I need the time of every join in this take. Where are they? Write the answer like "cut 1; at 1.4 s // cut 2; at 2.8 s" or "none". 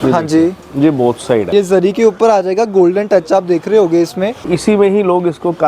cut 1; at 1.5 s // cut 2; at 4.4 s